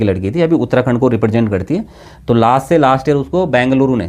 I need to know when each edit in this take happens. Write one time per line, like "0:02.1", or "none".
none